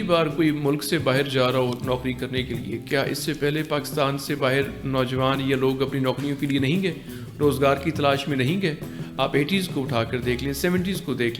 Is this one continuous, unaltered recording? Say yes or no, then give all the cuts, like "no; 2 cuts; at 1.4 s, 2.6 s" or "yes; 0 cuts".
yes; 0 cuts